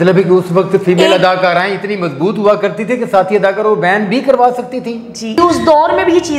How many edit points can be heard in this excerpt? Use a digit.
1